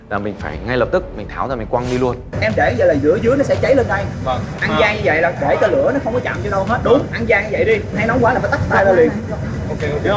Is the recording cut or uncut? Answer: uncut